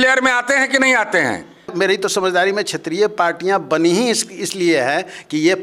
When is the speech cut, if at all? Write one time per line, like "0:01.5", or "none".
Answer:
0:01.7